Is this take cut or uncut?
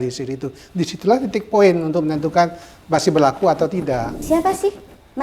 cut